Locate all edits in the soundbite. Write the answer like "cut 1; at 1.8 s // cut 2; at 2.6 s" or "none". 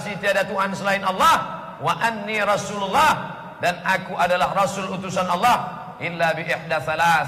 none